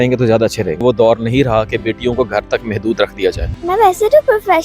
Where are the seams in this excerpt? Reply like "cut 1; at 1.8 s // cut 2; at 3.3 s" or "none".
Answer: cut 1; at 0.8 s // cut 2; at 3.5 s